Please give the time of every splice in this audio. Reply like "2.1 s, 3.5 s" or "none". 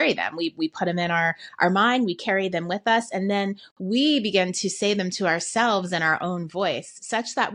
none